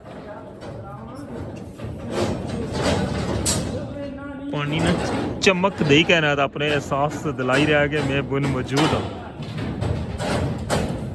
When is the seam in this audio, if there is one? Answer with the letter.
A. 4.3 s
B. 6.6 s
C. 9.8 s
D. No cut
C